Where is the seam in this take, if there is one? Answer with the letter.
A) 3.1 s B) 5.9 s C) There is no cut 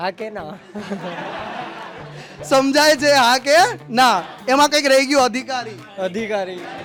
C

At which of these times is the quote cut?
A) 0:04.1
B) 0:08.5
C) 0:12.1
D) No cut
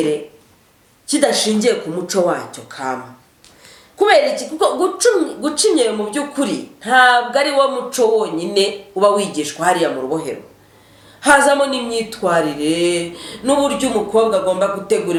D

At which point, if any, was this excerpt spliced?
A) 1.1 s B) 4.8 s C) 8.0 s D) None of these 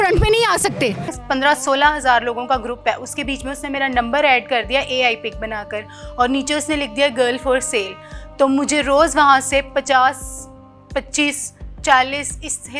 A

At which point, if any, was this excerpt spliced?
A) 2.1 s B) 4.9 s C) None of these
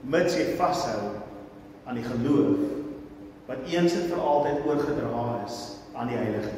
C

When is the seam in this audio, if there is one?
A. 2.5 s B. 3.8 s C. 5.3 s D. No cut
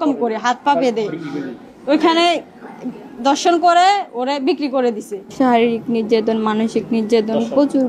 C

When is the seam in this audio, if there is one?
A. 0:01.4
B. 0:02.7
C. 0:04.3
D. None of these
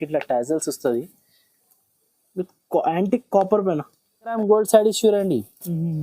C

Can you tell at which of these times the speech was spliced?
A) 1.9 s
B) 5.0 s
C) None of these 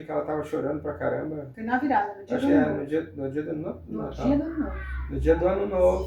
C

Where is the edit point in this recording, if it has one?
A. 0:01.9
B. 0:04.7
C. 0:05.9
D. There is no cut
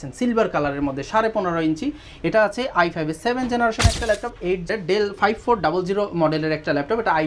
B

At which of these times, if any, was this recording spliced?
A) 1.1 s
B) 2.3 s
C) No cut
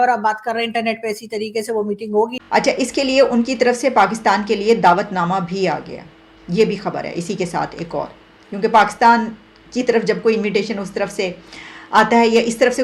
B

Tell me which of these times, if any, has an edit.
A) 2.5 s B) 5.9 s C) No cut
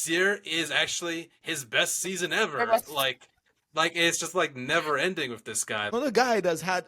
B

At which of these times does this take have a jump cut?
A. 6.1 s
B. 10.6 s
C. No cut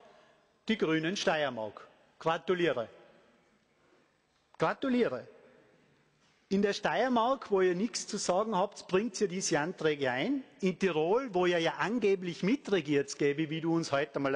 C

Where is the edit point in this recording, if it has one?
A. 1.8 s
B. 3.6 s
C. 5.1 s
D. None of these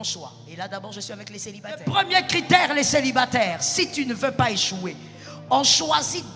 A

